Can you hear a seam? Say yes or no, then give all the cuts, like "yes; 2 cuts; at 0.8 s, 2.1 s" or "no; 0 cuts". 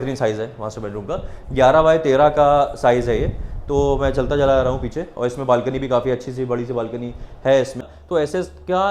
yes; 1 cut; at 8.0 s